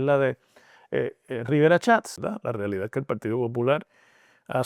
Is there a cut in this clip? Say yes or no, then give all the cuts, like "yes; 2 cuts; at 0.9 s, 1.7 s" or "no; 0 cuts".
yes; 1 cut; at 2.2 s